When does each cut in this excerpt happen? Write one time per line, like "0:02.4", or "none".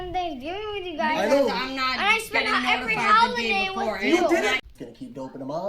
0:04.5